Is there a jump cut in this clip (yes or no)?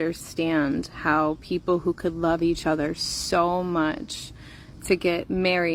no